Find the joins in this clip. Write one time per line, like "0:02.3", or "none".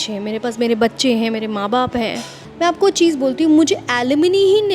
0:02.4